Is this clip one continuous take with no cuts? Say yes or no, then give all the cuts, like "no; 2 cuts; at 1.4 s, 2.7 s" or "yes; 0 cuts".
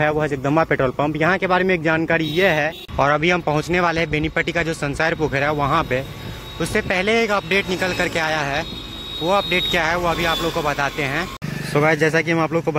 no; 2 cuts; at 2.8 s, 11.4 s